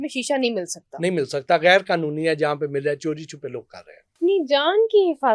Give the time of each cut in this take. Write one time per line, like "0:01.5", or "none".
0:04.2